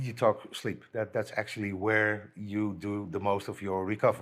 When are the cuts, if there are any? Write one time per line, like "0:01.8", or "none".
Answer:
none